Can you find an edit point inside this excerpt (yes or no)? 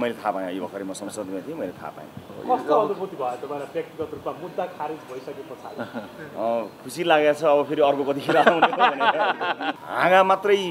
yes